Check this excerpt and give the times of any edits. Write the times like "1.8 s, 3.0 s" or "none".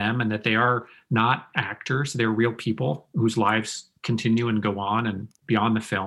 none